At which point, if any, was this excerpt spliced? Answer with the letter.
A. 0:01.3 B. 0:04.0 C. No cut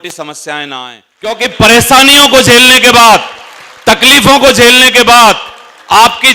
A